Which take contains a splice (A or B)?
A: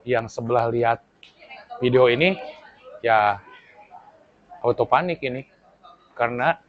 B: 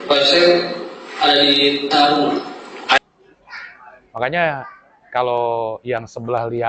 B